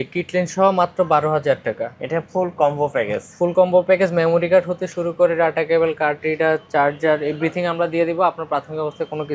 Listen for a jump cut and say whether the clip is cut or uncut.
uncut